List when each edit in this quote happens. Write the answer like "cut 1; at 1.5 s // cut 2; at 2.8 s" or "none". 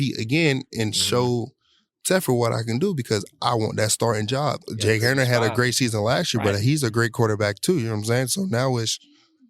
cut 1; at 4.6 s